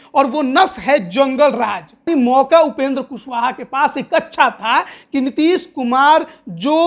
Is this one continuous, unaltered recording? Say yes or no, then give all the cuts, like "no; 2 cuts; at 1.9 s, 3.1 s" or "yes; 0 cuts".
no; 1 cut; at 2.0 s